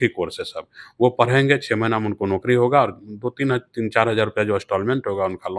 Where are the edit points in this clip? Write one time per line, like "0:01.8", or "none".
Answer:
none